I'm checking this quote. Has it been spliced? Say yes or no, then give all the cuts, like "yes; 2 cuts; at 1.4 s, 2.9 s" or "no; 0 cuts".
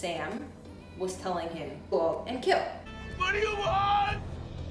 yes; 1 cut; at 3.1 s